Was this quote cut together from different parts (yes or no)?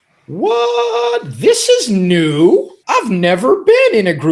yes